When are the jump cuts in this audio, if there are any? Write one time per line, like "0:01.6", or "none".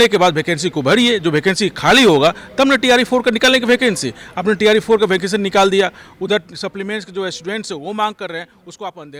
none